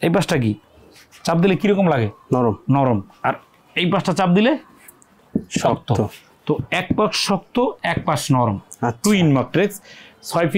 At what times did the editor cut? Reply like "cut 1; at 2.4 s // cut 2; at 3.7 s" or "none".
none

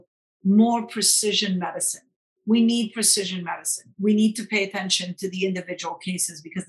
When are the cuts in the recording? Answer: cut 1; at 3.8 s

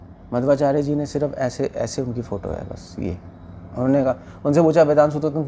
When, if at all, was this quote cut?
none

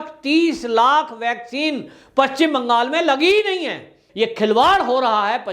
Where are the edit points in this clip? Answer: cut 1; at 4.0 s

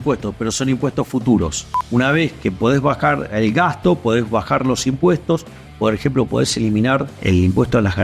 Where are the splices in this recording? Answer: cut 1; at 1.6 s // cut 2; at 3.3 s // cut 3; at 7.1 s

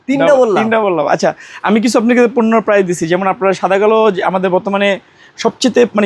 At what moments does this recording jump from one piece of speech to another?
none

